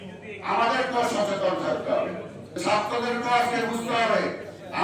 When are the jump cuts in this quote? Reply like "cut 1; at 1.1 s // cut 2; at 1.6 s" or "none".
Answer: cut 1; at 2.6 s